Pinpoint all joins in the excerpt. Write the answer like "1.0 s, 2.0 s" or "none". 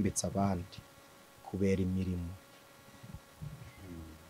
none